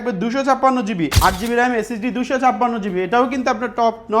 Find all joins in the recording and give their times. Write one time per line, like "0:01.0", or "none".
0:01.2